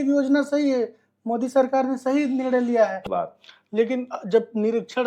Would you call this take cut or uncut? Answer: cut